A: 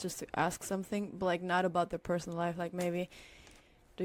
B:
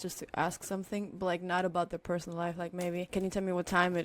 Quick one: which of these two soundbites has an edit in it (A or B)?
B